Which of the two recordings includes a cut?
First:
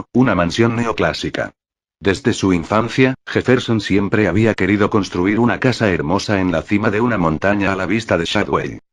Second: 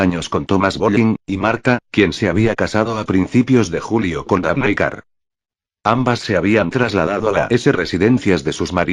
second; 1 cut; at 6.1 s

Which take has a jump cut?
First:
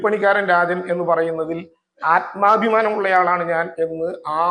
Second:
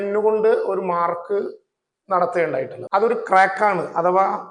second; 1 cut; at 2.8 s

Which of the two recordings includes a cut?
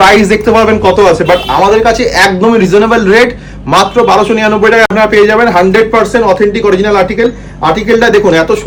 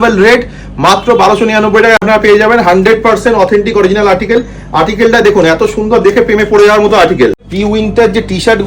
second; 1 cut; at 7.5 s

